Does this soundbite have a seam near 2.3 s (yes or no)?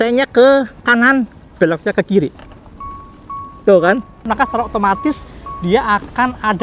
yes